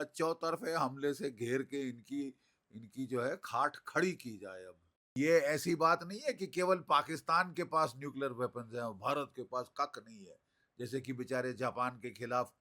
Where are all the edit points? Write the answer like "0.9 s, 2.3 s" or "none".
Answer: 5.1 s